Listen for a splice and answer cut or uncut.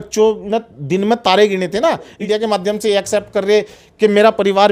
cut